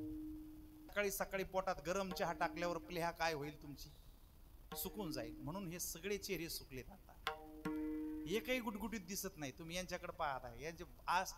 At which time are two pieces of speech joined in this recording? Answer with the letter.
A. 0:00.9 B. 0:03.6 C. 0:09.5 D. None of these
A